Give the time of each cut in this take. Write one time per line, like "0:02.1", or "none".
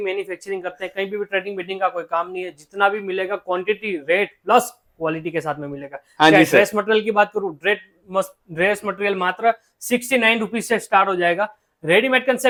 none